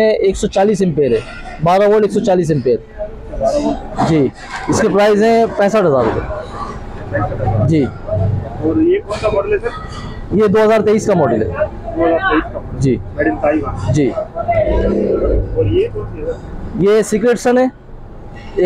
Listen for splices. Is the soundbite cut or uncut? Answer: uncut